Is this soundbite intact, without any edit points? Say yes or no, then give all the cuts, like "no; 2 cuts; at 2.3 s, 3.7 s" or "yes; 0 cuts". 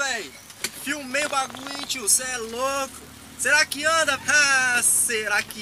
no; 1 cut; at 4.2 s